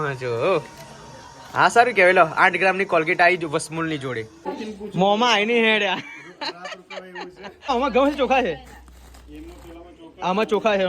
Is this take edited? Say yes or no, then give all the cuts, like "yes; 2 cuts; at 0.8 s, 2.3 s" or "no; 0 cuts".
yes; 2 cuts; at 4.4 s, 7.7 s